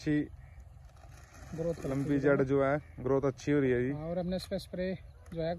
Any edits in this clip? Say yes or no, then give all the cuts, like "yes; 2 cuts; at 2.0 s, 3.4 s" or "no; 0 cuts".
no; 0 cuts